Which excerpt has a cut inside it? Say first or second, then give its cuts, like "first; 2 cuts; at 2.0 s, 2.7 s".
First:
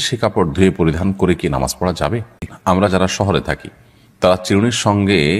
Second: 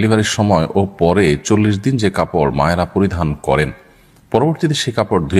first; 1 cut; at 2.5 s